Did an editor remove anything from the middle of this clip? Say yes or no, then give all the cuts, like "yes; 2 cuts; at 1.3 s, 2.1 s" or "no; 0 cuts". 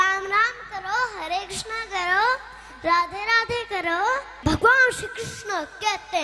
yes; 1 cut; at 4.3 s